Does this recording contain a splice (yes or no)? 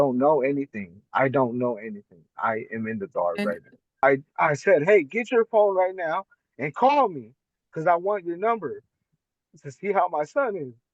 yes